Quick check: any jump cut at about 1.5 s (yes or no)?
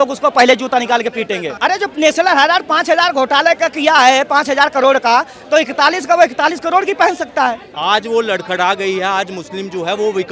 yes